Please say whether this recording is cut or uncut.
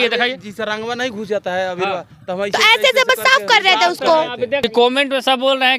cut